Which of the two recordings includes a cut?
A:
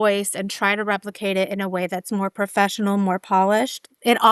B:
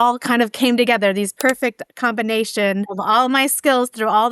B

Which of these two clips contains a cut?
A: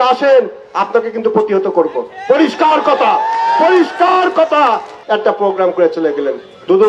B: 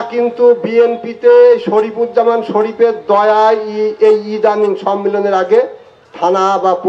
A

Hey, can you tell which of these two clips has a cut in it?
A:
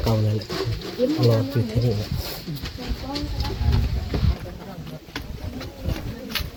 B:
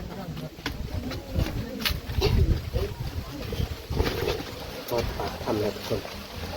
B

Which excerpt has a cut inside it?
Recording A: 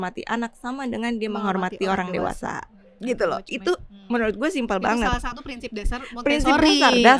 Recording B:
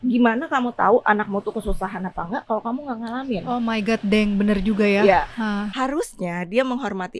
B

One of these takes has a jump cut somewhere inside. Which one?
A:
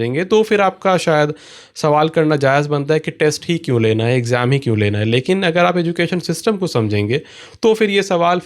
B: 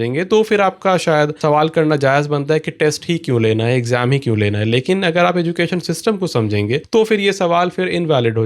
B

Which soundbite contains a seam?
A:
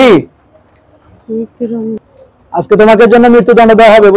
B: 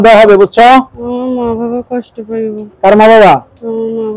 A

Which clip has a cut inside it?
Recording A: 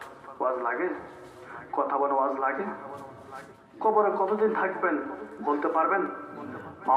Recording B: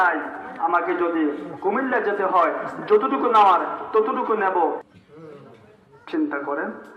B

